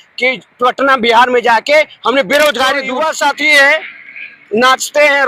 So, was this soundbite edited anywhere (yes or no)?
yes